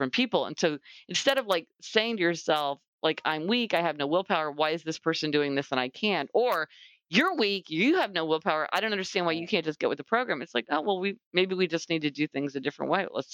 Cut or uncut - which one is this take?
uncut